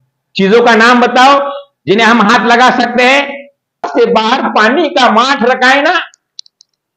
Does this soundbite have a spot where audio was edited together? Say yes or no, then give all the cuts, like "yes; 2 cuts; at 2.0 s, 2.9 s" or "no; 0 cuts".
yes; 1 cut; at 3.9 s